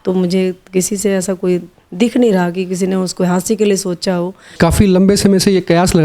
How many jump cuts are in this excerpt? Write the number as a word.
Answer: one